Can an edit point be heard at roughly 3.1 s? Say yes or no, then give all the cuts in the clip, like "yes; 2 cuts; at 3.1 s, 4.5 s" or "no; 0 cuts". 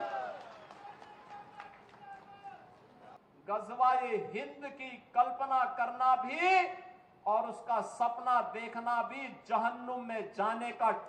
yes; 1 cut; at 3.1 s